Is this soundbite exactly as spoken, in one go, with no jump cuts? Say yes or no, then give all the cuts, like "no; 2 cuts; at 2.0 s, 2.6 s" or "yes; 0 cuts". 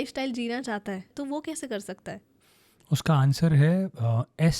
no; 2 cuts; at 1.1 s, 2.4 s